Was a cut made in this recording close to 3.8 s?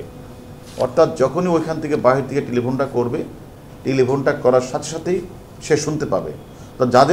no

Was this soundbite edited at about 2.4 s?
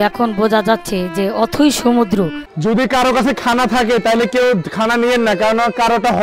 yes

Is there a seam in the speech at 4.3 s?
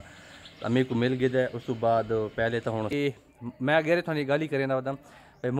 no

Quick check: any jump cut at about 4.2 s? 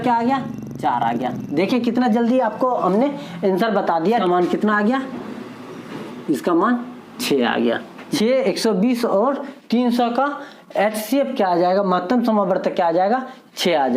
yes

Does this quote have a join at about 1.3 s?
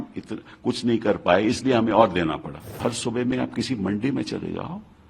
no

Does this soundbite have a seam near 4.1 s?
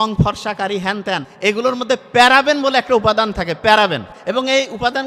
yes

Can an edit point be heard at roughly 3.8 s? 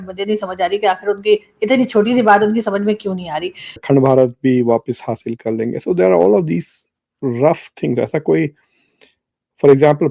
yes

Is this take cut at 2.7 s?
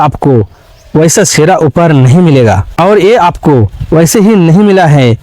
yes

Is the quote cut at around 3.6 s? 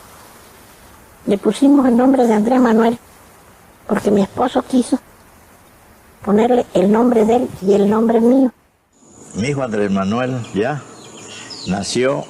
no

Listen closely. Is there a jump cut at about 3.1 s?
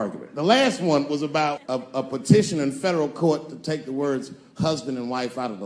no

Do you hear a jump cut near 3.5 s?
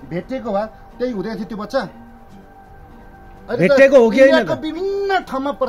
yes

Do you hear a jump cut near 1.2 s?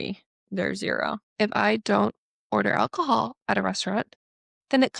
yes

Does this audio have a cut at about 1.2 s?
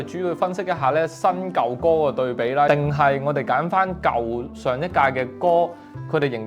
no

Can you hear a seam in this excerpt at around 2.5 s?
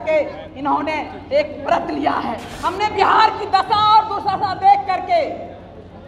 yes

